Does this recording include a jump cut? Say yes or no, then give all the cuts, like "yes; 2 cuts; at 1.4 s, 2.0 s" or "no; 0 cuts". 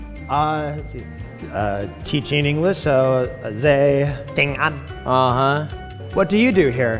no; 0 cuts